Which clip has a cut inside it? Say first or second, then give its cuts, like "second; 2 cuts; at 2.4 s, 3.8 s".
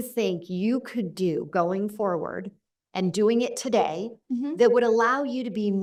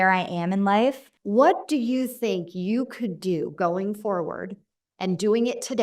second; 1 cut; at 1.1 s